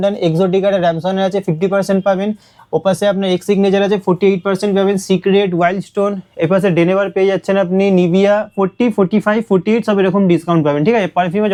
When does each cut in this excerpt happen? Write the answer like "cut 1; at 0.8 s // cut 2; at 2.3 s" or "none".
none

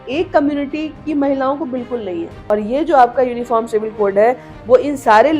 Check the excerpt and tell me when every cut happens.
cut 1; at 2.4 s

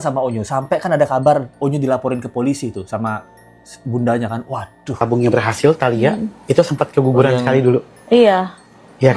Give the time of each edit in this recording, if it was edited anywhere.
cut 1; at 5.0 s

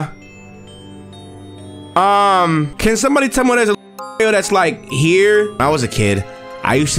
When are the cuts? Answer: cut 1; at 2.7 s // cut 2; at 5.6 s

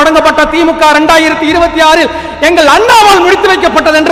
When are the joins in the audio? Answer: none

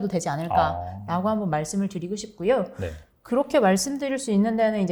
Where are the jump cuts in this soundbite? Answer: none

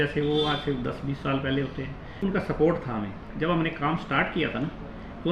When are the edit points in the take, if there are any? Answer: cut 1; at 2.2 s // cut 2; at 3.3 s

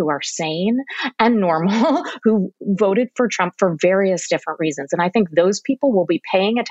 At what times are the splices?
none

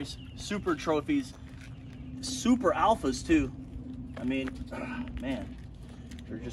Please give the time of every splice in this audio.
none

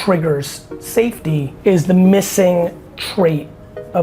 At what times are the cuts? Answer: cut 1; at 1.5 s

